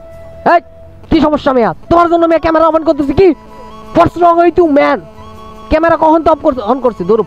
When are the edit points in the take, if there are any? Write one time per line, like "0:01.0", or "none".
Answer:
none